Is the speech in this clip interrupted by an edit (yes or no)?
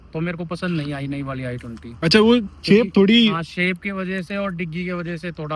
no